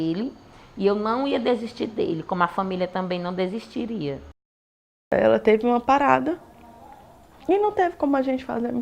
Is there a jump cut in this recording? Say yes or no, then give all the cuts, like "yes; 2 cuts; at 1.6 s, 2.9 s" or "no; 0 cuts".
yes; 1 cut; at 5.0 s